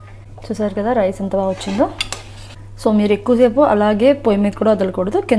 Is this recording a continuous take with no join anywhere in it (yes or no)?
yes